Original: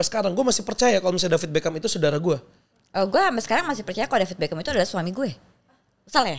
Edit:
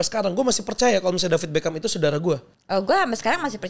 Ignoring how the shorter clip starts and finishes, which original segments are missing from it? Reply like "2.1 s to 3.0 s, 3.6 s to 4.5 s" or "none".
2.5 s to 2.8 s

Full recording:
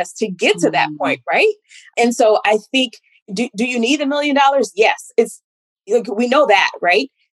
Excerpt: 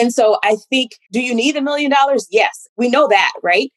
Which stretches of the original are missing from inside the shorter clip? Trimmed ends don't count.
3.1 s to 3.5 s, 5.1 s to 6.0 s

